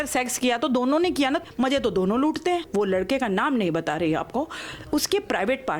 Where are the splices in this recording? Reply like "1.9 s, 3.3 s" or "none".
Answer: 1.4 s, 2.7 s